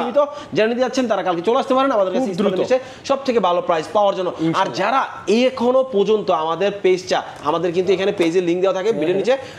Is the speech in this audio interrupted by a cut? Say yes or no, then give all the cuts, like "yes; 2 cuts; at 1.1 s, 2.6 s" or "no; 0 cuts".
no; 0 cuts